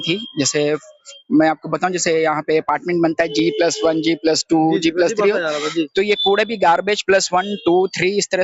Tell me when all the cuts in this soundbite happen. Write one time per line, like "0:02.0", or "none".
none